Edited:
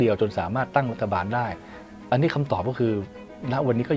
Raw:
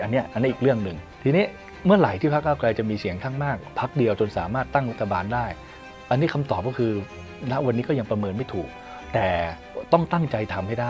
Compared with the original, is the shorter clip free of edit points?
yes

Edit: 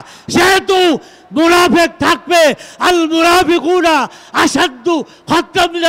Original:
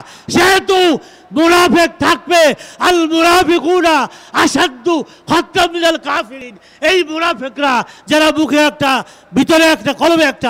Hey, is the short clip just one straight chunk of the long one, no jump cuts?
yes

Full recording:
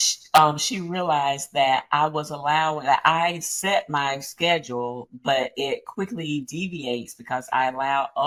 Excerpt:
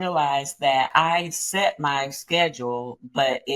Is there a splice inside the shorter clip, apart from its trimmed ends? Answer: yes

